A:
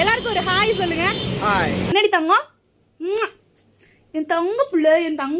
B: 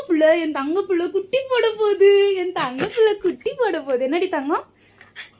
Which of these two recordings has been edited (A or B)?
A